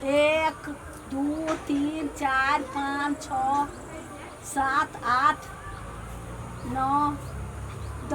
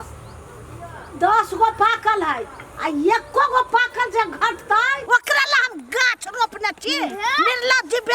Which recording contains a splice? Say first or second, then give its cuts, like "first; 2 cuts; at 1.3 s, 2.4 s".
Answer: second; 1 cut; at 5.0 s